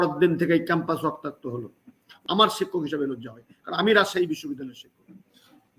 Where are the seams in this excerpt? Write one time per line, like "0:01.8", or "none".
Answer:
0:02.1